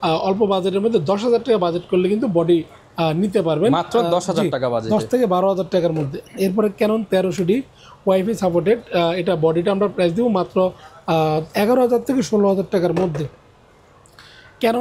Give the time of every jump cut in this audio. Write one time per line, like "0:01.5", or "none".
none